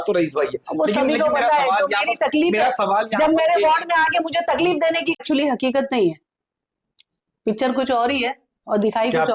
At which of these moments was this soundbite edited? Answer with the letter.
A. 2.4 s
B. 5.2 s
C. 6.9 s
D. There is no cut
B